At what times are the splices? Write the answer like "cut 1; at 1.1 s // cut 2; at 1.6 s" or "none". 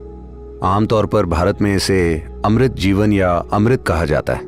none